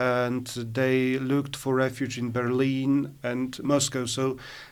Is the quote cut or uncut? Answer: uncut